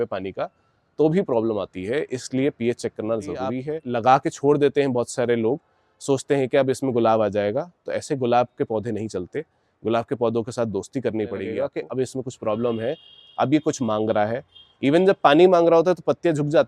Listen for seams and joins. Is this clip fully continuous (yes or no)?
no